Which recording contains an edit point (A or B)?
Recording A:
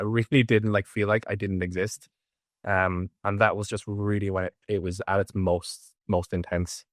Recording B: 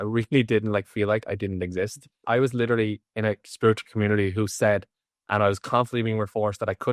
B